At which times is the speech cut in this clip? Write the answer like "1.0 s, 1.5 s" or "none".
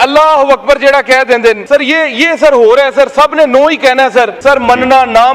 1.6 s, 4.3 s